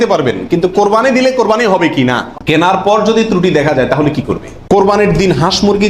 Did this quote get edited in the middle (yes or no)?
yes